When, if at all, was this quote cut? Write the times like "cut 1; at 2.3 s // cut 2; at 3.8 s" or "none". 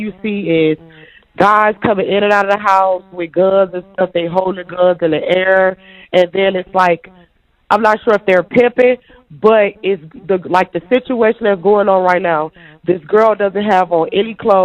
none

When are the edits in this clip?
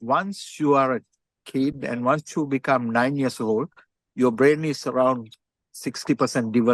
none

